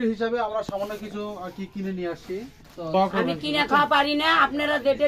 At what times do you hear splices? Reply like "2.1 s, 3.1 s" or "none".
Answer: 2.9 s